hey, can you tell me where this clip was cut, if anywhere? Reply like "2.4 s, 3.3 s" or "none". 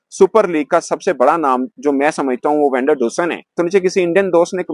3.4 s